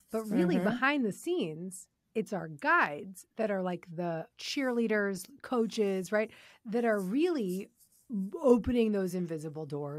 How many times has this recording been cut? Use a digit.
1